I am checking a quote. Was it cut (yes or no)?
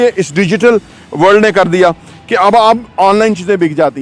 no